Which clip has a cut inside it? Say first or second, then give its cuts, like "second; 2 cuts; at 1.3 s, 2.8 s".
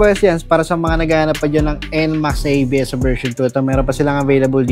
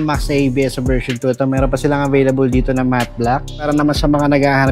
second; 1 cut; at 3.7 s